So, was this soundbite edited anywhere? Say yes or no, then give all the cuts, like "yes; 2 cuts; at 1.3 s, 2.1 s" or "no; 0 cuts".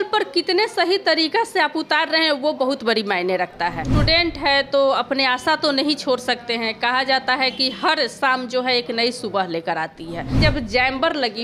yes; 2 cuts; at 3.9 s, 10.4 s